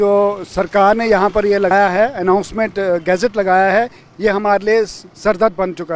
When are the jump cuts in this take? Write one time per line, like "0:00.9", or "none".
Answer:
0:01.7